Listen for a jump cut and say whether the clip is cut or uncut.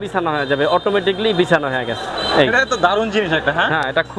uncut